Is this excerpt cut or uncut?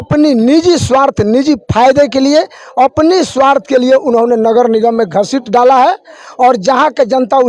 uncut